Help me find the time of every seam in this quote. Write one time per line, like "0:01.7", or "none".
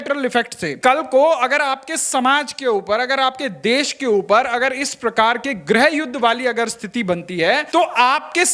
0:00.8
0:07.7